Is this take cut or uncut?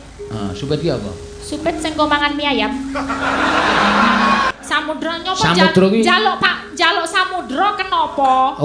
cut